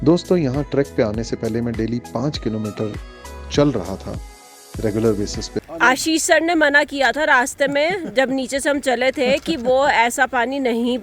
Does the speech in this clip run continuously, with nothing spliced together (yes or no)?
no